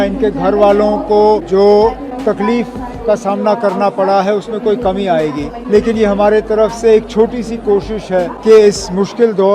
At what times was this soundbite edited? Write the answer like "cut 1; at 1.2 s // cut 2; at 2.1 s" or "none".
cut 1; at 1.4 s // cut 2; at 2.1 s // cut 3; at 5.6 s // cut 4; at 8.4 s